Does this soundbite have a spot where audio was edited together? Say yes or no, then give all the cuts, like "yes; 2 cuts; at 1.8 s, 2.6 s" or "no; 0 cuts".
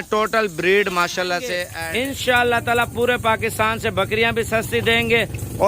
yes; 1 cut; at 1.7 s